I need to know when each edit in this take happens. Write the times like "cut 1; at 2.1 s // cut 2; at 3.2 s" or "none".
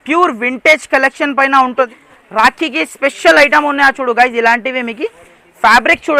cut 1; at 2.0 s